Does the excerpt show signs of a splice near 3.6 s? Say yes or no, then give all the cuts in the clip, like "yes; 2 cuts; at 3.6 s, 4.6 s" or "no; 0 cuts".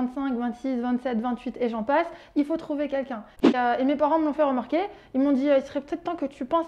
yes; 1 cut; at 3.6 s